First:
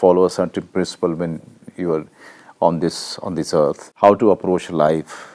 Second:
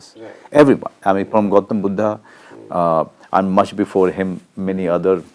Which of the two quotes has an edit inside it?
first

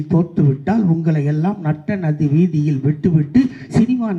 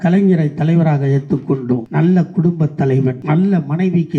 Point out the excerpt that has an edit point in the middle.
second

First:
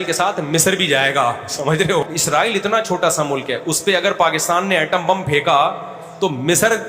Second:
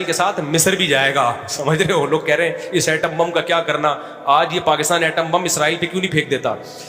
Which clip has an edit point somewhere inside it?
first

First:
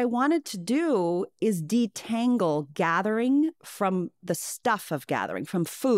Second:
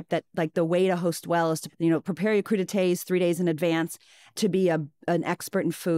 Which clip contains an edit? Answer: second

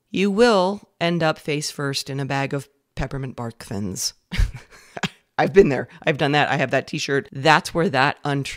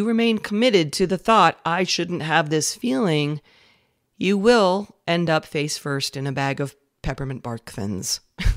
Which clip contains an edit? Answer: first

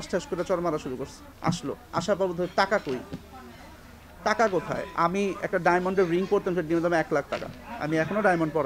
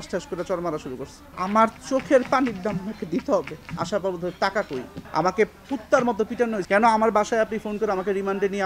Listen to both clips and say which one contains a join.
second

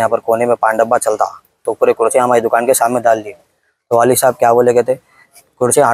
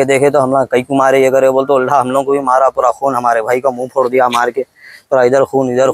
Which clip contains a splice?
first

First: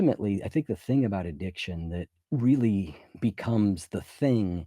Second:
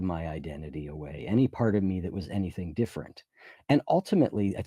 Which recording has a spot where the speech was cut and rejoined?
first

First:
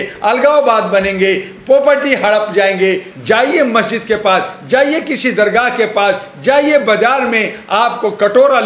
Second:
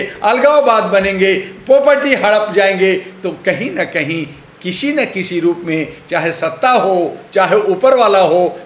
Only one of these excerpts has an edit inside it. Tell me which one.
first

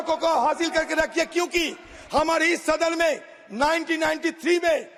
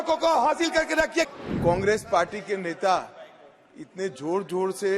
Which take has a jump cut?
second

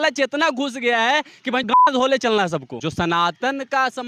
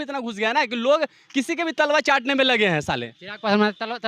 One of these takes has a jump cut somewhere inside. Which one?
first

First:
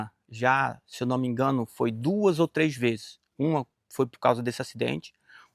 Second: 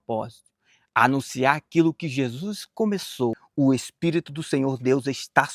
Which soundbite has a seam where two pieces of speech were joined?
second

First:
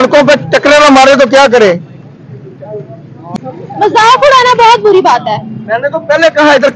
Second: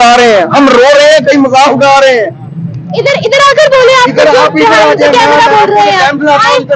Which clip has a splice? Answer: first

